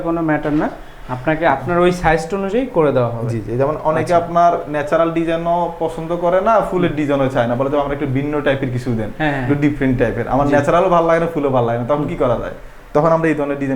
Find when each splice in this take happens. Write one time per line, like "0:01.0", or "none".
none